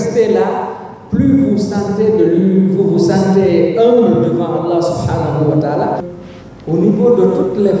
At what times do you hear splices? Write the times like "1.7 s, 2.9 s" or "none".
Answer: 6.1 s